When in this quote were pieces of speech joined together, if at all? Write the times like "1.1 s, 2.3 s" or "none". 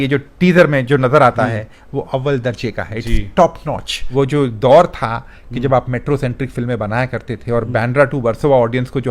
3.9 s